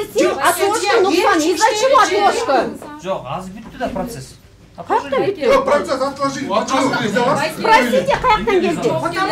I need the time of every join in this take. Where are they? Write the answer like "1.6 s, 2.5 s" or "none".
none